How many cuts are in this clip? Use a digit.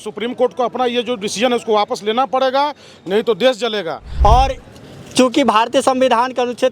1